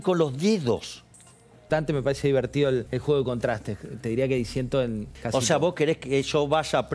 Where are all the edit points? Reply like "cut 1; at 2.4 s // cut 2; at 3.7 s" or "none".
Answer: cut 1; at 1.7 s // cut 2; at 2.9 s // cut 3; at 5.1 s